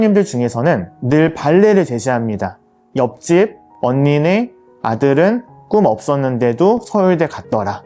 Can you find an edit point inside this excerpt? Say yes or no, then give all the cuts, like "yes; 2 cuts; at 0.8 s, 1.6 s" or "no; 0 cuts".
no; 0 cuts